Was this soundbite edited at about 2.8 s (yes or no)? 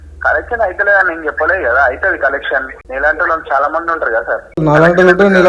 yes